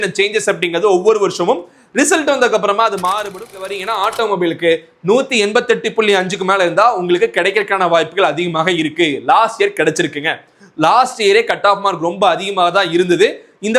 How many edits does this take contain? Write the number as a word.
one